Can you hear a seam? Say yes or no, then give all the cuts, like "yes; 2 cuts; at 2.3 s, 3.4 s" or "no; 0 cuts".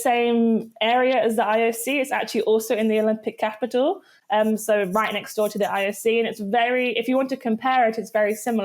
no; 0 cuts